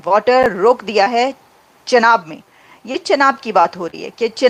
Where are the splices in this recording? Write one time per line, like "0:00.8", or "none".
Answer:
none